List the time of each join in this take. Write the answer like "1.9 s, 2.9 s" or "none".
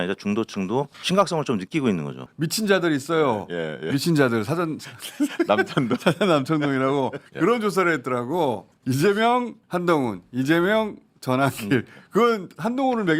1.0 s, 2.3 s, 7.2 s, 8.7 s, 9.6 s